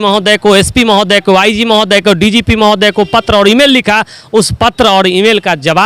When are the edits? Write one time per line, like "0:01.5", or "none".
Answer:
none